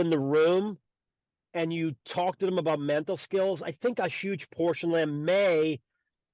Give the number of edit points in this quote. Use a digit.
0